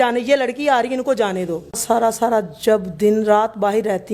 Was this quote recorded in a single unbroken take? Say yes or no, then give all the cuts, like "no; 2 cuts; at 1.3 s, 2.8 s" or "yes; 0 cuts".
no; 1 cut; at 1.7 s